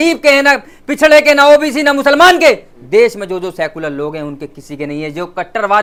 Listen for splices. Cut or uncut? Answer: uncut